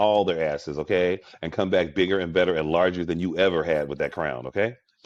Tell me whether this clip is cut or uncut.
uncut